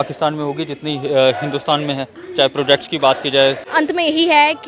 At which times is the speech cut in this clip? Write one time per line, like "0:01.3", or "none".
0:03.6